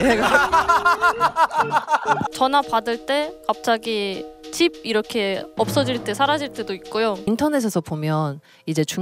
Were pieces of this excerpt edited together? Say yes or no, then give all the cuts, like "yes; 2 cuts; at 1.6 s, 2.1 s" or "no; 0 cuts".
yes; 2 cuts; at 2.3 s, 7.3 s